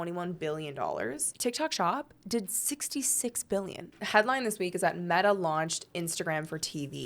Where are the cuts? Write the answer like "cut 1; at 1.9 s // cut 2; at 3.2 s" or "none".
cut 1; at 3.9 s